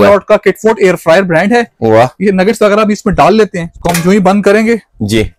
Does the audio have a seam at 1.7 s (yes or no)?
no